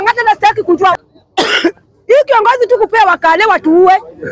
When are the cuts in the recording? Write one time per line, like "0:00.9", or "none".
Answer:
0:00.9